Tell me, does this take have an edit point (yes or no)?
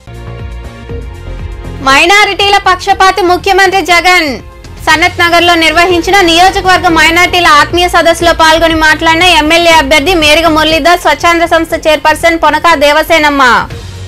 no